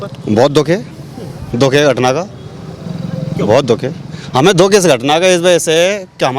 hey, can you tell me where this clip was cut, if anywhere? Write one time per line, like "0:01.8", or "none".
none